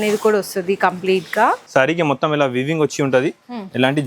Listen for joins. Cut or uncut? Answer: cut